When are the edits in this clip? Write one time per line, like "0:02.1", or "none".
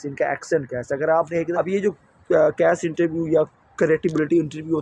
0:01.5